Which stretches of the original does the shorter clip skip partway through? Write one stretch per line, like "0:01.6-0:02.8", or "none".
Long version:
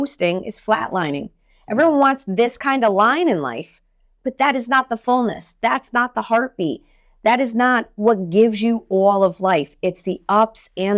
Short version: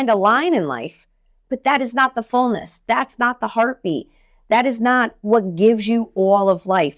none